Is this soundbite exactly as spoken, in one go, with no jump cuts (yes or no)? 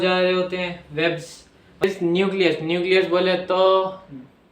no